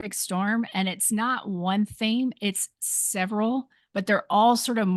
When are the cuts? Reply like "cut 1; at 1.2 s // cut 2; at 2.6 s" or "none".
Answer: none